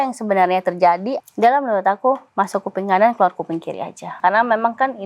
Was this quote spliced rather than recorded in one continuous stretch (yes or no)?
yes